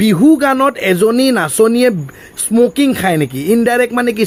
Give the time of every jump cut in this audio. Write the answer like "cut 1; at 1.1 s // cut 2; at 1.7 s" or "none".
none